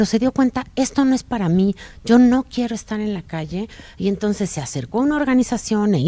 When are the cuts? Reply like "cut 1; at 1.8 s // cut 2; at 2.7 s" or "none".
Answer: none

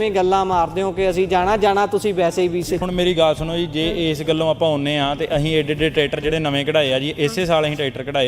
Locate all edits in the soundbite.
cut 1; at 2.8 s

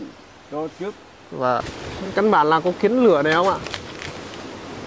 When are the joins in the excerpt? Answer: cut 1; at 1.6 s

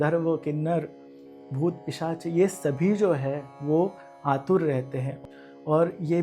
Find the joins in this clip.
cut 1; at 5.1 s

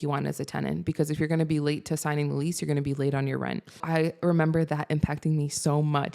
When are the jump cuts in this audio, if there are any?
cut 1; at 3.8 s

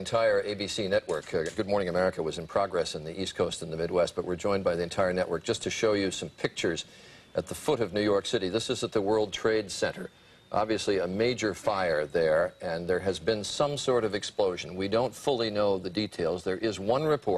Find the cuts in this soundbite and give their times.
cut 1; at 1.6 s

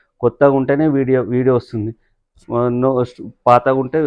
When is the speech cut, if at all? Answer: none

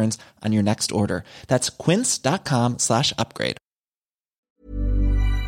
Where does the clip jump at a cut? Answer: cut 1; at 4.4 s

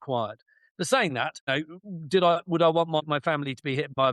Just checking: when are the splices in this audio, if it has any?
cut 1; at 1.5 s // cut 2; at 3.0 s

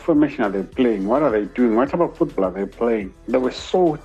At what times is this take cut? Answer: cut 1; at 3.1 s

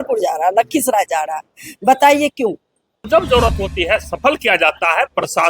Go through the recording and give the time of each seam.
cut 1; at 3.0 s

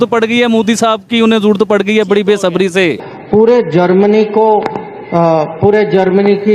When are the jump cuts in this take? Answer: cut 1; at 3.0 s

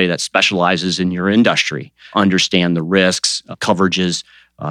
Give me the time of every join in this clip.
cut 1; at 2.0 s

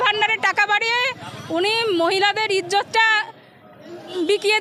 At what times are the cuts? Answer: none

